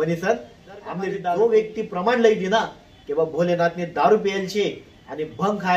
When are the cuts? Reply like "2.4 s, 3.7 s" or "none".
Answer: 1.1 s

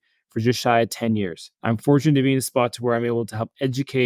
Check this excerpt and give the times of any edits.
1.4 s

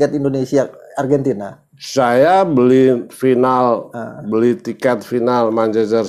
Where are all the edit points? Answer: none

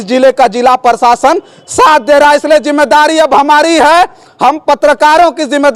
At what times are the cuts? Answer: none

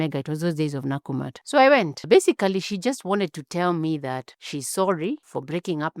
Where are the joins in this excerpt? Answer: 1.3 s, 2.0 s

